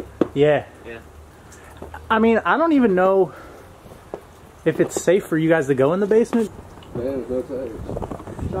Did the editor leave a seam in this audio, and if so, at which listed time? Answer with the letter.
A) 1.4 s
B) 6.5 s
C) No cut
B